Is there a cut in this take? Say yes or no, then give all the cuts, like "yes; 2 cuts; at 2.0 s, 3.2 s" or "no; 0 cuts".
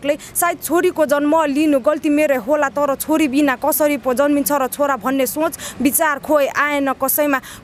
no; 0 cuts